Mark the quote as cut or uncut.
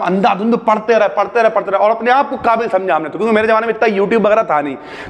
uncut